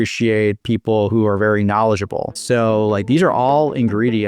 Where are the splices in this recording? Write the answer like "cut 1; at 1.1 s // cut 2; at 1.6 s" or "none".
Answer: cut 1; at 2.4 s